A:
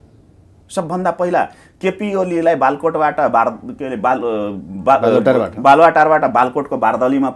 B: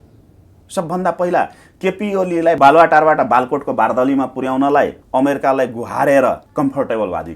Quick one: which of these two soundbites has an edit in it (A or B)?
B